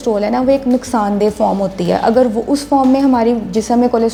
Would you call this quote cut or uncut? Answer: uncut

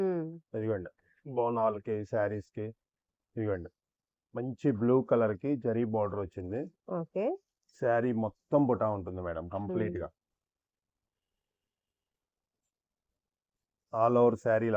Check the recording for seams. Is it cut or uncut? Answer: uncut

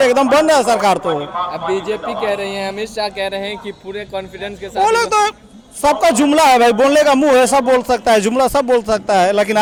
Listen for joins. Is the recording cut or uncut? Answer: uncut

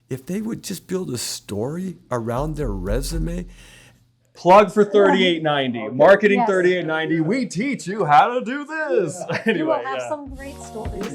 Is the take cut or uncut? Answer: cut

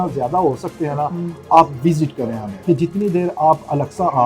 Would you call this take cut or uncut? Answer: cut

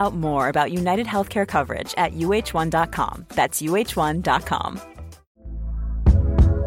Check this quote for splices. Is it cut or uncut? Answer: cut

